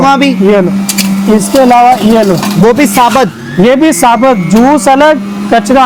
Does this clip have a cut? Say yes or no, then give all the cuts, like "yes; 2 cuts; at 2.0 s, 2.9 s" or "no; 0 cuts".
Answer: no; 0 cuts